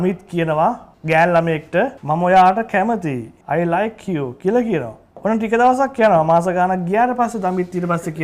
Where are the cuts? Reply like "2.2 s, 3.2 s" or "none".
0.9 s, 2.0 s, 3.3 s, 5.0 s